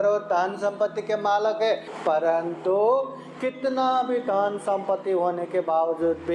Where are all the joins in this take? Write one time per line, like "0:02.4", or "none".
0:01.9